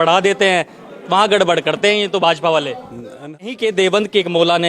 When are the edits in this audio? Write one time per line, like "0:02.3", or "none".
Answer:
0:03.3